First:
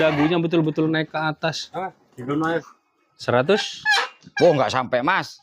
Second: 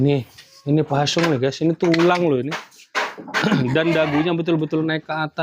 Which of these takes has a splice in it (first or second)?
first